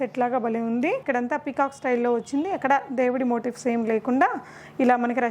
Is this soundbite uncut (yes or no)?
no